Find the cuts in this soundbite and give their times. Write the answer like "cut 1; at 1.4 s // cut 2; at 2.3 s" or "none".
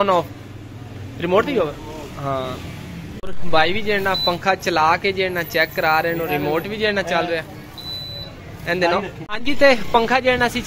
cut 1; at 3.2 s // cut 2; at 9.3 s

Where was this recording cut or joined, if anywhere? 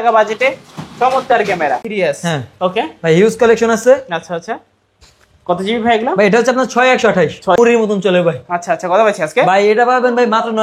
cut 1; at 1.9 s // cut 2; at 7.6 s

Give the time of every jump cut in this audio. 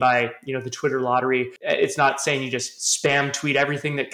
cut 1; at 1.6 s

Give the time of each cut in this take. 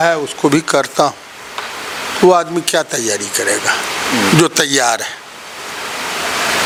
none

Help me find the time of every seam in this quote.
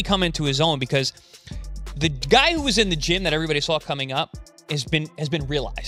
none

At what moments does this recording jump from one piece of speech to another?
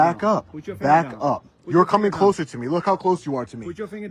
none

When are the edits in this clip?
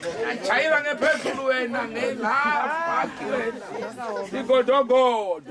none

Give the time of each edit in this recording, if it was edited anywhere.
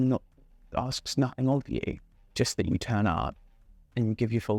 none

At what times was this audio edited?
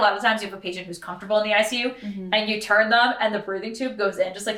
none

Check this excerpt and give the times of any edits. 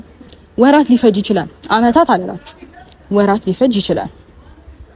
none

